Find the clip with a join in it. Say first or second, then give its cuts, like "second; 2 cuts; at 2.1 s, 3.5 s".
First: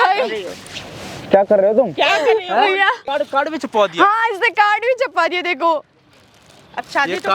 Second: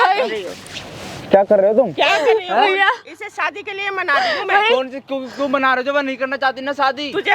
first; 1 cut; at 3.0 s